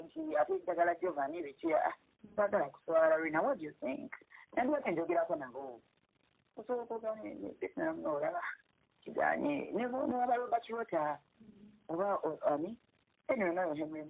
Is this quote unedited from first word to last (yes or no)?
yes